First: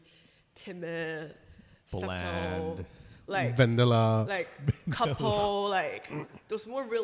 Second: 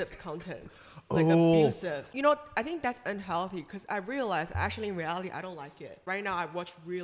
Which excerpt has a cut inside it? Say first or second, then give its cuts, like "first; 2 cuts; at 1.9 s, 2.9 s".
second; 2 cuts; at 2.0 s, 6.0 s